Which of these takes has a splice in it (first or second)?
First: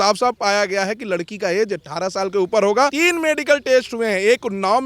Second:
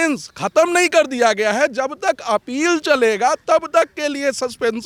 first